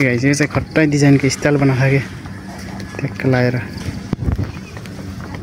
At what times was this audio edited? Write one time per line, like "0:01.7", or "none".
none